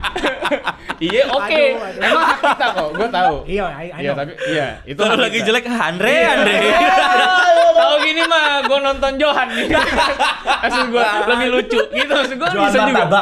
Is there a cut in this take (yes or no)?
no